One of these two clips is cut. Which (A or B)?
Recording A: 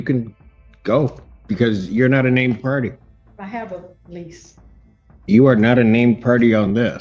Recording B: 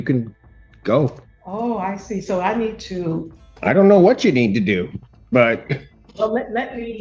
B